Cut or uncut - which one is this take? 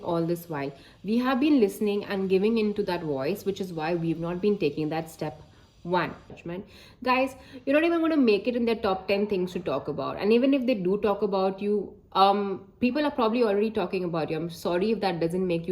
cut